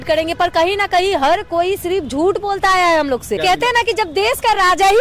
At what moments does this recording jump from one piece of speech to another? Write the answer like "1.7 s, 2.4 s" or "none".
3.3 s